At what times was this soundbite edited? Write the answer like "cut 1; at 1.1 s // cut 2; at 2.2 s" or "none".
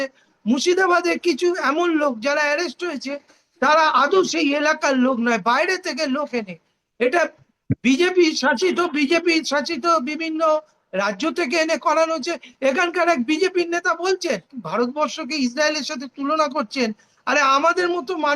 cut 1; at 14.6 s